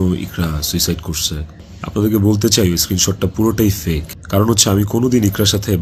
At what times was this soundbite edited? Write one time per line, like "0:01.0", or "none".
none